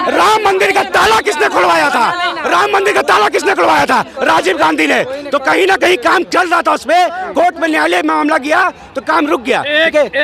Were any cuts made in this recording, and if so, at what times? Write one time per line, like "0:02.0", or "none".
none